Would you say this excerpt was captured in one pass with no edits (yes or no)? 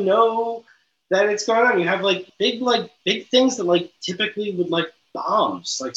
no